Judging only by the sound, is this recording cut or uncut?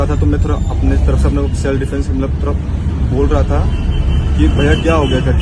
uncut